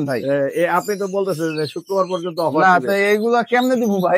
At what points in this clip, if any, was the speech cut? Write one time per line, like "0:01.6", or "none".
none